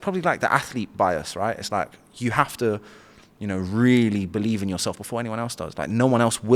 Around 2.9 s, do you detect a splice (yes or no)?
no